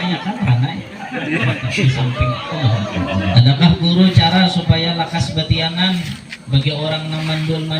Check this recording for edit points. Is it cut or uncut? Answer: cut